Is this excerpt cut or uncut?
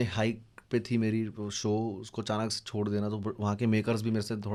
uncut